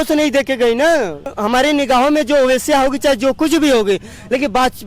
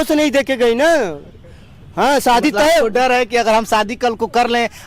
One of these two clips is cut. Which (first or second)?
first